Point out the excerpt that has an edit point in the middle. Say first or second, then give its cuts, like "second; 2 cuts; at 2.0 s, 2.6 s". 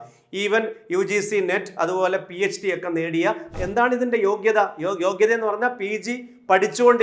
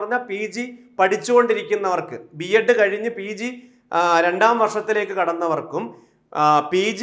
first; 1 cut; at 3.6 s